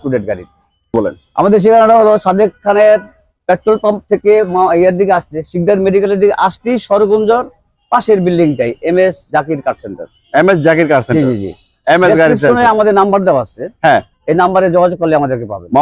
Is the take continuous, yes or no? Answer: no